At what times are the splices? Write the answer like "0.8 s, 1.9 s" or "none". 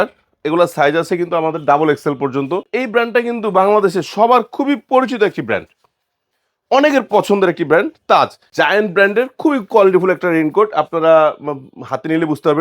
2.7 s, 8.4 s